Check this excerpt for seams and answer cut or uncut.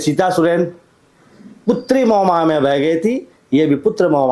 uncut